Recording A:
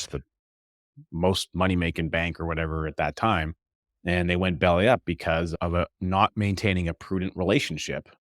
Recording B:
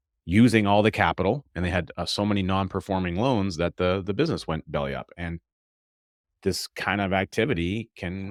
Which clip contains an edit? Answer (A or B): A